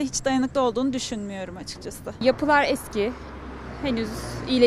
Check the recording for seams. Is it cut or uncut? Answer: cut